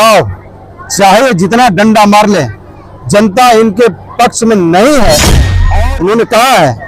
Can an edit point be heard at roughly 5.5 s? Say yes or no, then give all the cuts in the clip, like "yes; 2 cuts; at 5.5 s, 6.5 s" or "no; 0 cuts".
yes; 1 cut; at 5.5 s